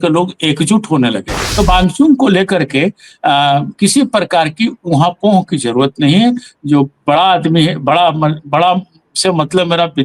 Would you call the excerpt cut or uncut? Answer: cut